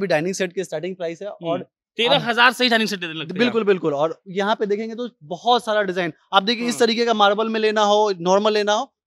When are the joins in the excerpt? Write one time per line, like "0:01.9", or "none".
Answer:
none